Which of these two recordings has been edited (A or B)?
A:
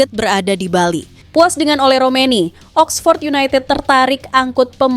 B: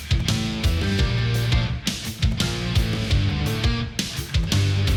A